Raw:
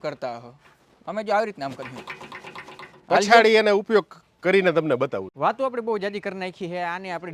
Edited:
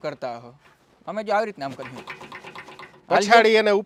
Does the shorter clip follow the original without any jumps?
yes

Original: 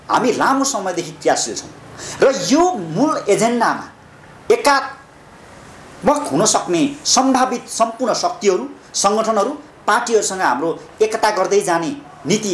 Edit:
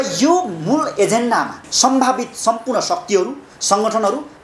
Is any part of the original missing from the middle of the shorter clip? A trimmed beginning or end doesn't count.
yes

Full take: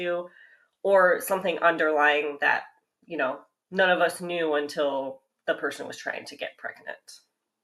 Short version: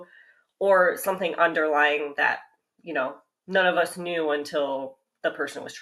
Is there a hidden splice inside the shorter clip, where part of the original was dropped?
no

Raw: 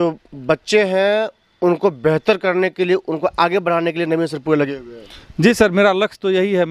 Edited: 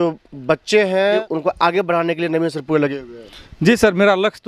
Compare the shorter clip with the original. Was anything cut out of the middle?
yes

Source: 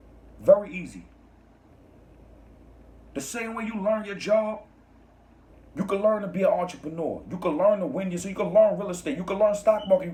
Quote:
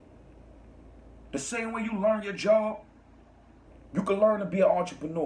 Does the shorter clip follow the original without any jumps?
yes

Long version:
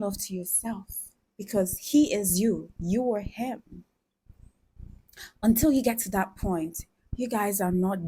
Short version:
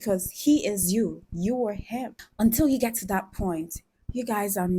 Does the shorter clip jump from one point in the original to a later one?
yes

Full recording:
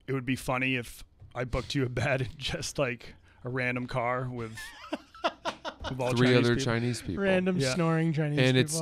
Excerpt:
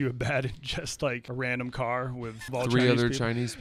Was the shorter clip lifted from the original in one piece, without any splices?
no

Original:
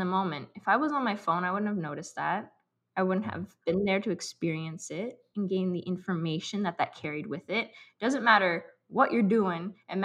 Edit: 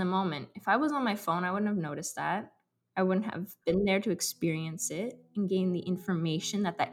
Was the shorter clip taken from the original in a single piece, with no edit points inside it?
yes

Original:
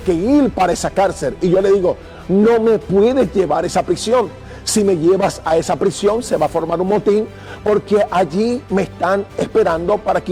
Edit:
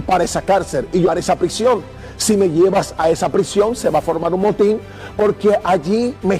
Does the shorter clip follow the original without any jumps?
no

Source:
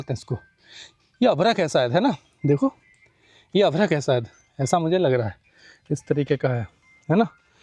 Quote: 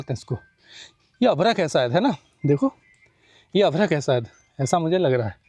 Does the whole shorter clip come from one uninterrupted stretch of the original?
yes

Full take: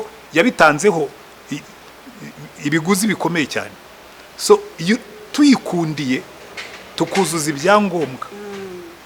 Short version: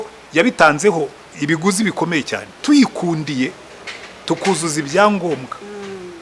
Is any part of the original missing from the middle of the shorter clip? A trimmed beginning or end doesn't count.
yes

